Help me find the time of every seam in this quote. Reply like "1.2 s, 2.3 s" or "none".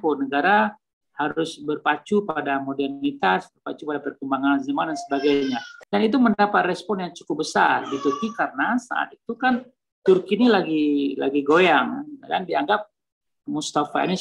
5.7 s